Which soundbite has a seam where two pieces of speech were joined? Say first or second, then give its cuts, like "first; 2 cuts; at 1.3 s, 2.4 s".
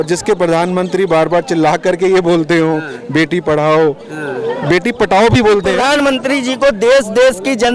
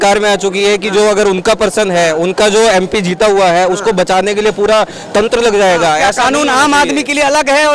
first; 1 cut; at 5.8 s